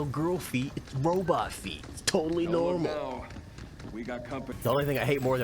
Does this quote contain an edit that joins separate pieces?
yes; 1 cut; at 4.5 s

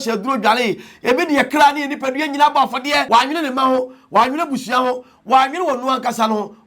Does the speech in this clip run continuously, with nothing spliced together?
no; 1 cut; at 3.0 s

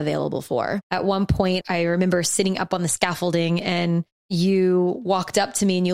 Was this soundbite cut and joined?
yes; 3 cuts; at 0.8 s, 1.6 s, 4.2 s

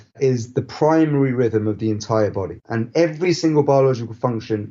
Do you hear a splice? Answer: yes; 1 cut; at 2.6 s

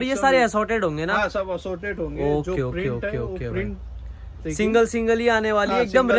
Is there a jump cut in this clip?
no; 0 cuts

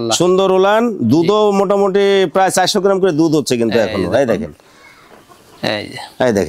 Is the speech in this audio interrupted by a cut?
no; 0 cuts

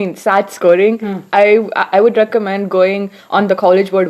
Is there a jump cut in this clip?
no; 0 cuts

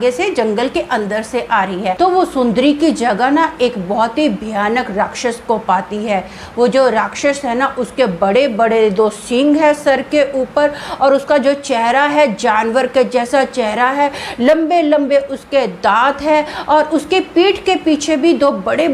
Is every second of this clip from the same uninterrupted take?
no; 1 cut; at 1.9 s

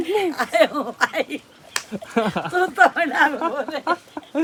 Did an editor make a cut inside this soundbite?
no; 0 cuts

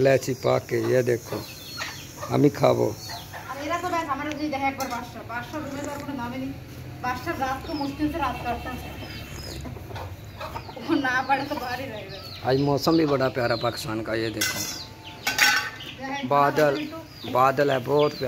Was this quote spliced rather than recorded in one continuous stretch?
no; 0 cuts

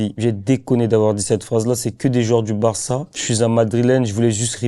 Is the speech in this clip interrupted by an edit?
yes; 1 cut; at 3.2 s

